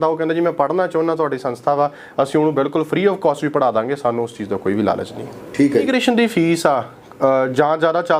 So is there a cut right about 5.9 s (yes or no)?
yes